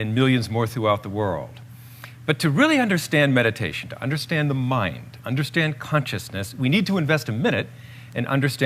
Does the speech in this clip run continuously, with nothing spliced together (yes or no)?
yes